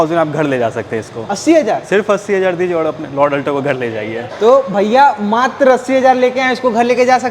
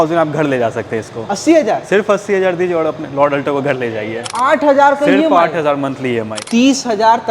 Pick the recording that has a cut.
second; 2 cuts; at 4.2 s, 6.4 s

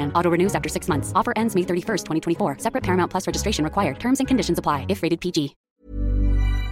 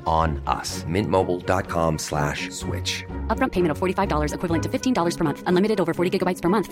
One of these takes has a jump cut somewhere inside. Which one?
first; 1 cut; at 5.6 s

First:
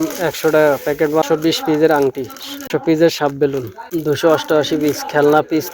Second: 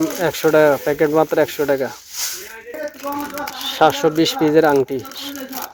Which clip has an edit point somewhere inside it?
first; 3 cuts; at 1.3 s, 2.7 s, 3.8 s

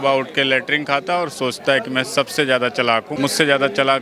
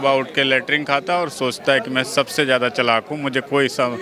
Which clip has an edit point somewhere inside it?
first; 1 cut; at 3.1 s

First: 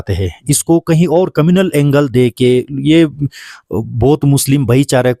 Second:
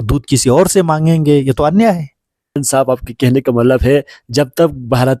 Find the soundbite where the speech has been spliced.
second; 1 cut; at 2.6 s

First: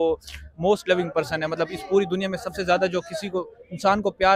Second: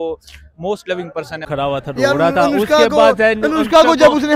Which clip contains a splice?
second; 1 cut; at 1.4 s

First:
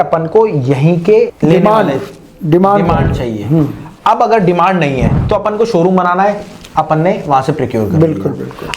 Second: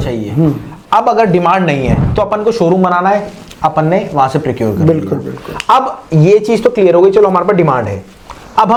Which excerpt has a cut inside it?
first; 1 cut; at 1.3 s

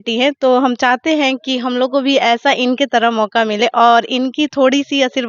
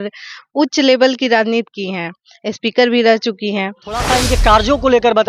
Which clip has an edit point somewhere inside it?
second; 1 cut; at 4.0 s

